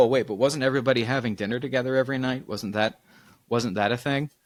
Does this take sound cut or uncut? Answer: uncut